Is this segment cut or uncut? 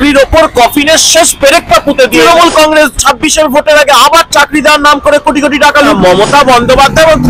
cut